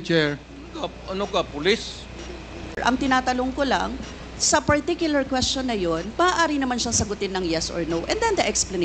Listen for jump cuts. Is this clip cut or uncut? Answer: cut